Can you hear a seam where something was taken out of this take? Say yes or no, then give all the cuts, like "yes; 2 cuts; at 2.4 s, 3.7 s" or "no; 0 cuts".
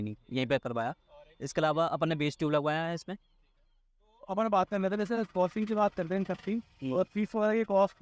no; 0 cuts